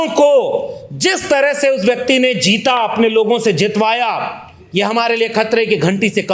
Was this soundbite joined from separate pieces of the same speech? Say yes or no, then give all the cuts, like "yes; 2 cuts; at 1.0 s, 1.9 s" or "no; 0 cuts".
no; 0 cuts